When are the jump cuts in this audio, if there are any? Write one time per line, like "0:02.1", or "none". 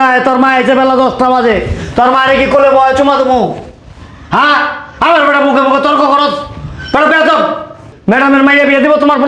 0:07.9